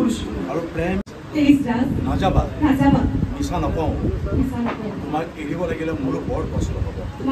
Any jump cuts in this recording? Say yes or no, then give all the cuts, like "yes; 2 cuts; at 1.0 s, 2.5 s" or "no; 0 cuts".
yes; 1 cut; at 1.2 s